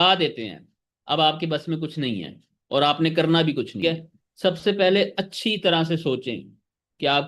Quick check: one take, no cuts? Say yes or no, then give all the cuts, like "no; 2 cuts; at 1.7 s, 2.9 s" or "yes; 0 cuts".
no; 1 cut; at 3.8 s